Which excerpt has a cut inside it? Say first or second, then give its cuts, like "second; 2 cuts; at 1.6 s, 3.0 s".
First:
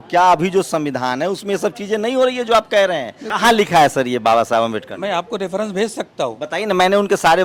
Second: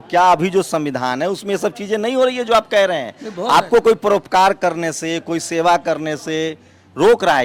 first; 1 cut; at 3.3 s